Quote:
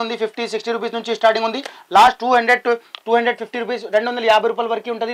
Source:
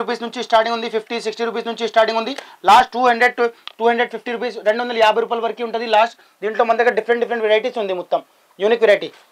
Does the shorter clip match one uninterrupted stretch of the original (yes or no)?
yes